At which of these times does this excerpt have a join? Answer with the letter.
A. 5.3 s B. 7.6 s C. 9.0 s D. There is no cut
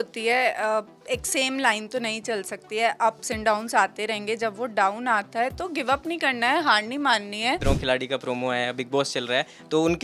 B